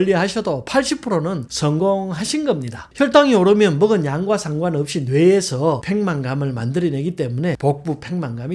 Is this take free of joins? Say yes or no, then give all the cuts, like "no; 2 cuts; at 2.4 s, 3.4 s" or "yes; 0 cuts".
yes; 0 cuts